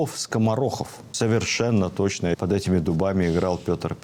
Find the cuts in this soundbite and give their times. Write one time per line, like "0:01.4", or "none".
0:01.0

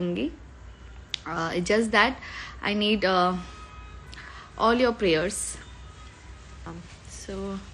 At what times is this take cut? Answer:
0:06.7

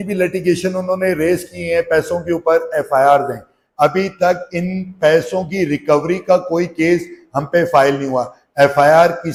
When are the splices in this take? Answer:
none

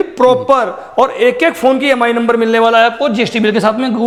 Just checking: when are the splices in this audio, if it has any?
none

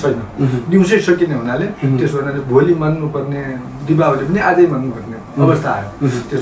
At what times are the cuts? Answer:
none

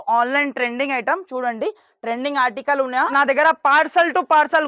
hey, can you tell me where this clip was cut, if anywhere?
0:03.1

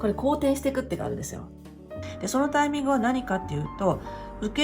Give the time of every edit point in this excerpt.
0:01.7

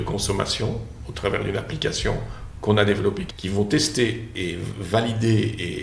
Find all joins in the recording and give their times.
0:03.3
0:04.3

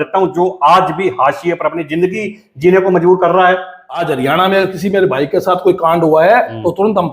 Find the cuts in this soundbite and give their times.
0:04.1

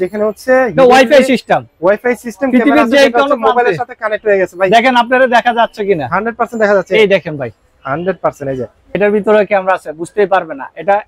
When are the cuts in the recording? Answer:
0:09.0

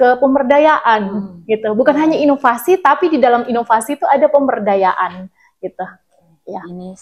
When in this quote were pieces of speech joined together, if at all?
none

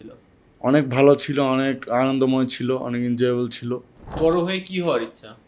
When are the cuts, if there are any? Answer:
0:04.2

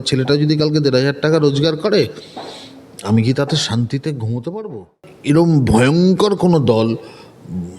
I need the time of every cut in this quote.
0:05.1

